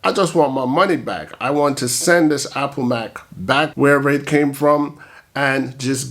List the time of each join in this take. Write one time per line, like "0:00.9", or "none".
0:03.7

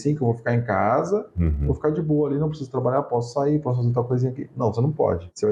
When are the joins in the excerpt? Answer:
none

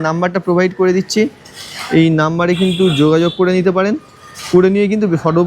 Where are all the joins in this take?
none

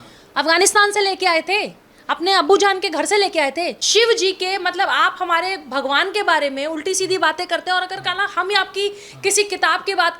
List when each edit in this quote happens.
0:03.7

